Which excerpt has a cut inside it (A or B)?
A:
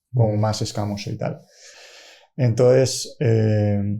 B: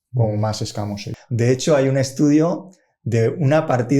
B